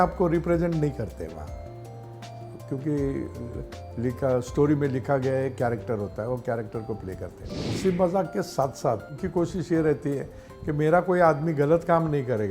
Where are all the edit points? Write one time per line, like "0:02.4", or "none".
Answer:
0:07.7
0:09.1